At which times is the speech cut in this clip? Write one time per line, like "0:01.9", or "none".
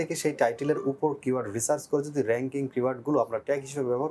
none